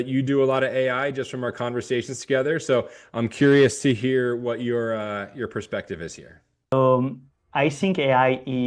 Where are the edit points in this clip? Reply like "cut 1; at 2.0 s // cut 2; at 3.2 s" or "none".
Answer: cut 1; at 6.7 s